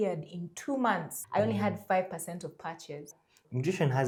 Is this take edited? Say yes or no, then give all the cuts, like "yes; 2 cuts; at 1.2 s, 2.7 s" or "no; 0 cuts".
no; 0 cuts